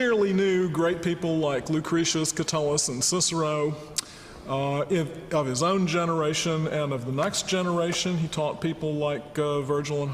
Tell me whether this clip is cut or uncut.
cut